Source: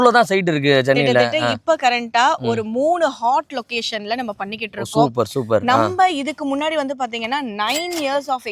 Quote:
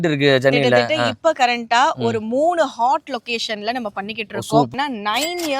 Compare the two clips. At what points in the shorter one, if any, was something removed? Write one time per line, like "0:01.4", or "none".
0:04.7